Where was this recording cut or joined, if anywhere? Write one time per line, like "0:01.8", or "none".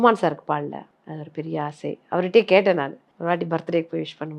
0:01.0
0:03.0